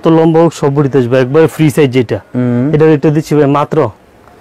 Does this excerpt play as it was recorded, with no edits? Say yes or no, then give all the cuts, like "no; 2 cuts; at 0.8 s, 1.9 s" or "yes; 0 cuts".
yes; 0 cuts